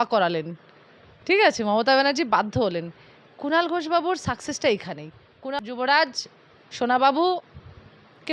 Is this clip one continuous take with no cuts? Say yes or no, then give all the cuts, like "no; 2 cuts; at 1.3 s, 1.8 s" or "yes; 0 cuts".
no; 1 cut; at 5.6 s